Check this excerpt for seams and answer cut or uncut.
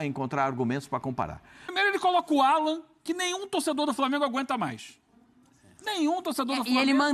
cut